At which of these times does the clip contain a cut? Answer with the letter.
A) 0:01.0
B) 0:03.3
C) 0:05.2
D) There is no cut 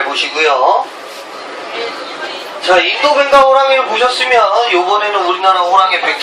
B